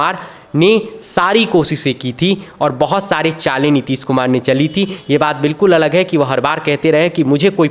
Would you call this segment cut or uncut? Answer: uncut